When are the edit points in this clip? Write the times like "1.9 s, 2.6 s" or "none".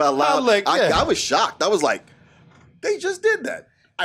none